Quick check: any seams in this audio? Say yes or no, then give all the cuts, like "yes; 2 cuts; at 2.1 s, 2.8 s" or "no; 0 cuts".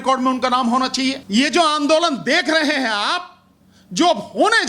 yes; 1 cut; at 1.2 s